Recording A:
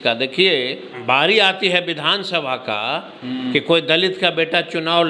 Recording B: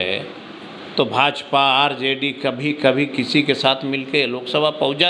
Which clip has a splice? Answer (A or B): A